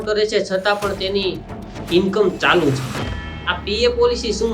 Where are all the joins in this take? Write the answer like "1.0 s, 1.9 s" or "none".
3.4 s